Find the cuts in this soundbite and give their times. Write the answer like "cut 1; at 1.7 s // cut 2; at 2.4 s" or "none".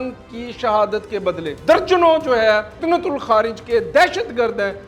cut 1; at 1.5 s // cut 2; at 2.7 s